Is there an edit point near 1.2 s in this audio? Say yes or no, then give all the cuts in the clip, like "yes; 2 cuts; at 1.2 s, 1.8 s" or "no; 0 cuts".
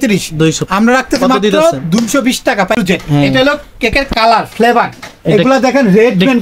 no; 1 cut; at 2.7 s